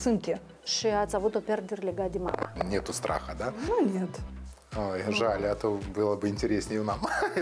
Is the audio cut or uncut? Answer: cut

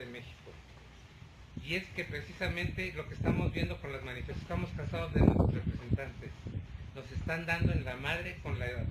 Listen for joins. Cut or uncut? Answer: uncut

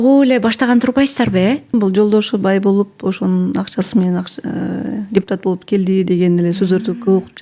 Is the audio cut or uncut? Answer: cut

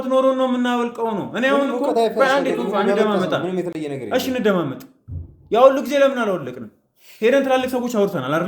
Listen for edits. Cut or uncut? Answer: uncut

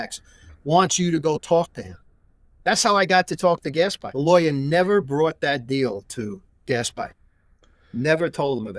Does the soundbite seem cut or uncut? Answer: cut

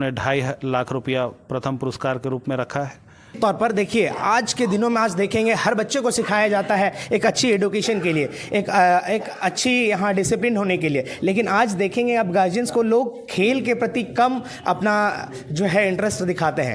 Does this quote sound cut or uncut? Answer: cut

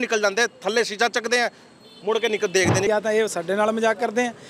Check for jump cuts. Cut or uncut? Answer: cut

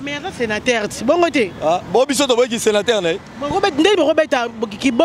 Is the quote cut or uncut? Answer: uncut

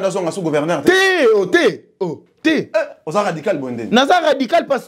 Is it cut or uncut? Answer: uncut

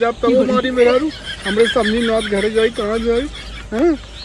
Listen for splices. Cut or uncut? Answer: uncut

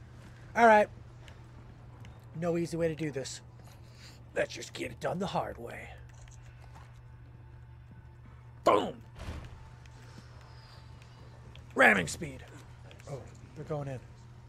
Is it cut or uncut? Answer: uncut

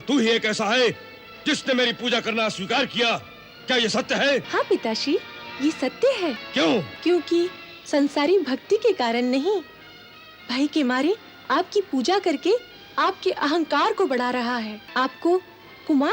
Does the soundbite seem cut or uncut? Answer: cut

